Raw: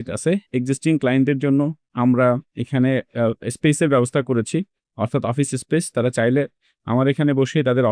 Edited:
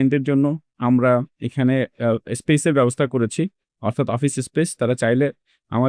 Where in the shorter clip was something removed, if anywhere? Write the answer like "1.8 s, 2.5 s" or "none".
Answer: none